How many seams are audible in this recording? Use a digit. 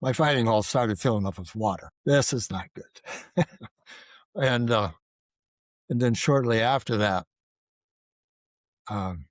1